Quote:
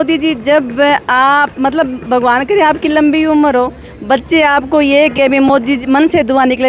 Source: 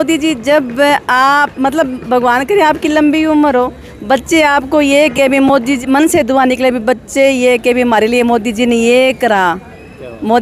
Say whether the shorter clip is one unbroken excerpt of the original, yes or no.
yes